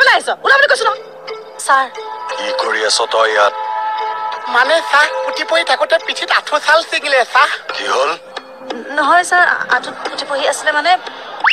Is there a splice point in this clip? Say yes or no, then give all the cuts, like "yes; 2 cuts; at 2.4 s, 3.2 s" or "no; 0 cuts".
yes; 1 cut; at 0.9 s